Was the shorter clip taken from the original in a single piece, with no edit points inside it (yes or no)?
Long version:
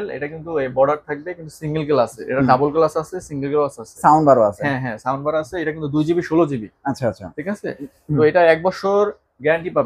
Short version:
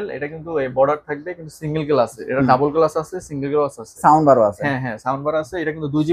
yes